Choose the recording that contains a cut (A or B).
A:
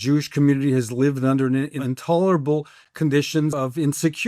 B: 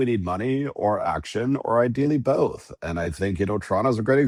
A